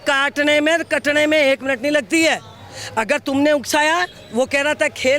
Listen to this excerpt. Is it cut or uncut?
uncut